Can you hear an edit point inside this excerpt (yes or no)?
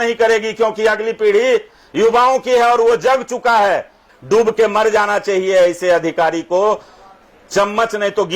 yes